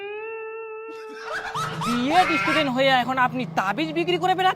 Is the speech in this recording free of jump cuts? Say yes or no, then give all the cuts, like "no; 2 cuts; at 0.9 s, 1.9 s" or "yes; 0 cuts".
no; 1 cut; at 1.3 s